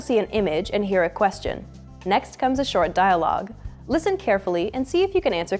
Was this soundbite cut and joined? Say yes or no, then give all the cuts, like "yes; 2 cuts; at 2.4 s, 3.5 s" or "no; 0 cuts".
no; 0 cuts